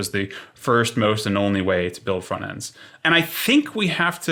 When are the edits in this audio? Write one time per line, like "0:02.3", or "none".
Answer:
none